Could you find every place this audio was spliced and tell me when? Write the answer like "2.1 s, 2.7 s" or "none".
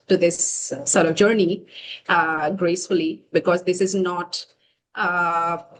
none